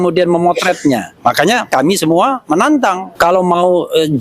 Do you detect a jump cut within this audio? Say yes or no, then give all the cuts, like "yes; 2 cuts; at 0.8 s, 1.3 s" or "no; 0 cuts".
yes; 2 cuts; at 1.7 s, 3.0 s